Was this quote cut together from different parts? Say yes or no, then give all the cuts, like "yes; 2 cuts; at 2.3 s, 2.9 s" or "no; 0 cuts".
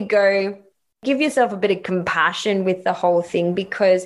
yes; 1 cut; at 1.0 s